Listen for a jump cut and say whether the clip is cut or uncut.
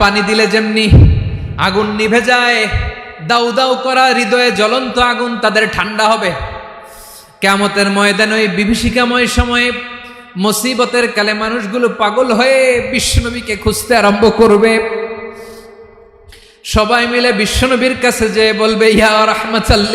uncut